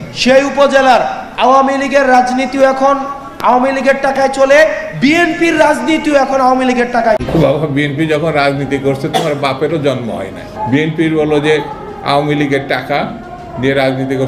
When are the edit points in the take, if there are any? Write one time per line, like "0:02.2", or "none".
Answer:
0:07.2